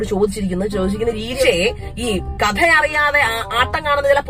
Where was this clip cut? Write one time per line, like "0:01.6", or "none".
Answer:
0:01.3

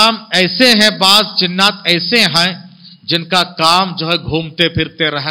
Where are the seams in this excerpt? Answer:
none

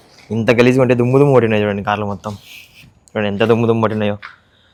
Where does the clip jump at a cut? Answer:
none

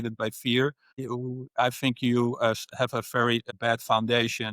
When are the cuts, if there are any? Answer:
0:01.1
0:03.5

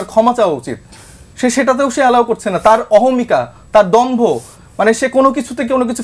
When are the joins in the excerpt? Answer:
none

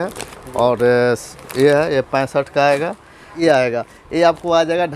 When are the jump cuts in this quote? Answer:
0:03.3

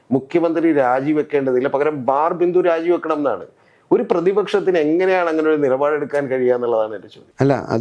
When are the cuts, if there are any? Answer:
none

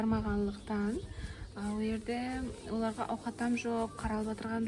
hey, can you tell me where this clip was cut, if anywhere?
none

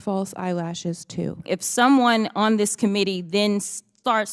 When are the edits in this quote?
0:01.4

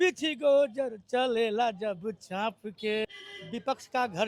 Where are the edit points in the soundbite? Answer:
0:03.0

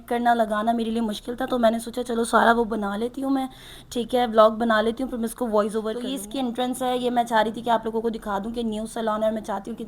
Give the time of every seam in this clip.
0:06.0

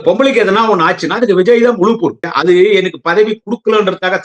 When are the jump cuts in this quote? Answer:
0:02.3

